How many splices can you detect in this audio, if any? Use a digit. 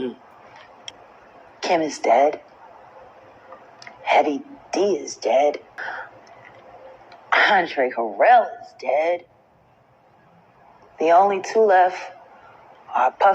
2